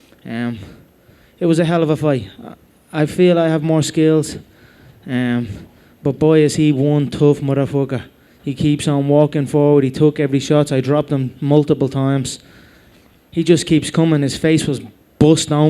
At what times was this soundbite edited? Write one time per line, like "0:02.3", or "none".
0:13.2